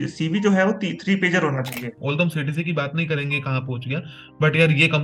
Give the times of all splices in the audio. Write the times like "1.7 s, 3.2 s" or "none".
1.9 s